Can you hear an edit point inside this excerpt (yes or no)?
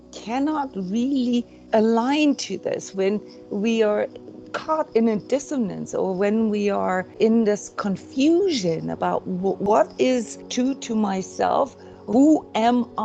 yes